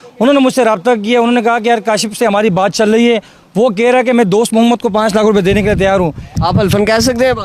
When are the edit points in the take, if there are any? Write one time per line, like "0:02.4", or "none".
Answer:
0:06.3